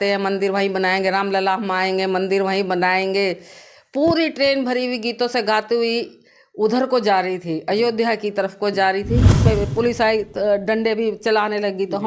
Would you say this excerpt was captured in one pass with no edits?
no; 1 cut; at 9.4 s

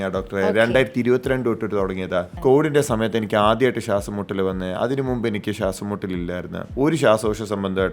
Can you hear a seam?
yes; 2 cuts; at 2.3 s, 6.7 s

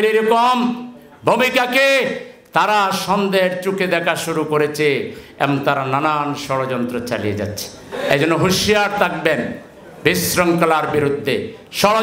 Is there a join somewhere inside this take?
no; 0 cuts

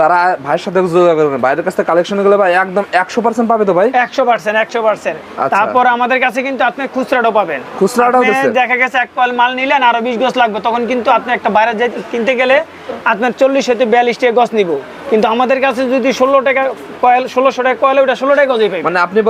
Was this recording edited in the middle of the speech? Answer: no; 0 cuts

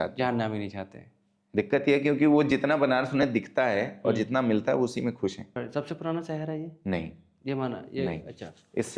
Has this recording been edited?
yes; 1 cut; at 5.4 s

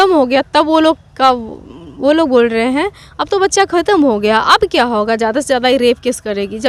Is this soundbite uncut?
yes; 0 cuts

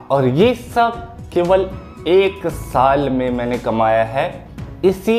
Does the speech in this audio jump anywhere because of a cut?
no; 0 cuts

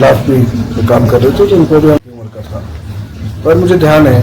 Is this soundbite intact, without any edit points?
no; 1 cut; at 2.0 s

